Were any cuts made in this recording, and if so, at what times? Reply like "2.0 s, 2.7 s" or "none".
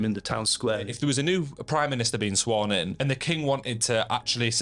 0.9 s, 3.0 s